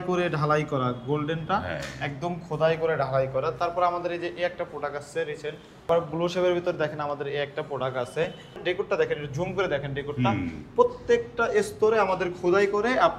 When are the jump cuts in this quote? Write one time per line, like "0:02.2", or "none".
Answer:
0:05.9
0:08.6